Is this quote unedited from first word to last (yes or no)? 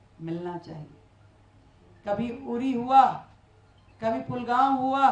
yes